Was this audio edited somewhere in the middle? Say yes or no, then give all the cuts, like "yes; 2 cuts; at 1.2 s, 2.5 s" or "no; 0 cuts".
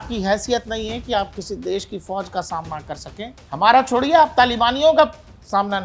yes; 1 cut; at 3.4 s